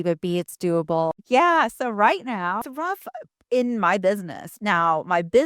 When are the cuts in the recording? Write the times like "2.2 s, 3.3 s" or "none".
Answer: 1.1 s, 2.6 s